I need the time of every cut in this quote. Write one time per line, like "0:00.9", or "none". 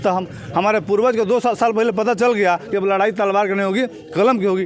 none

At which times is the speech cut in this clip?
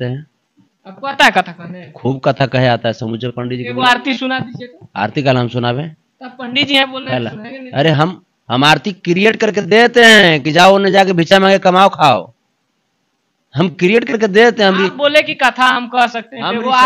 none

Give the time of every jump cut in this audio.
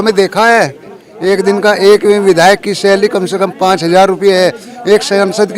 0:01.0

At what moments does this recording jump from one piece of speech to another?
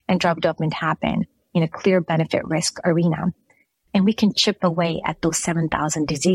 0:03.7

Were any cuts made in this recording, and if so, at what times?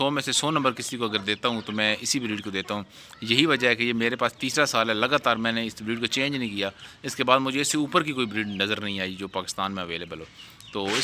none

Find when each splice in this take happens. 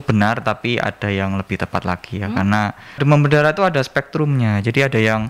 0:03.0

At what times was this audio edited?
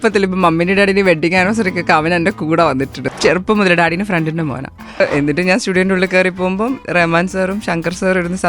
0:03.0
0:05.0

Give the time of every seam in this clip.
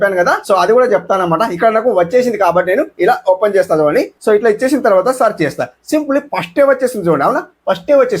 0:04.1

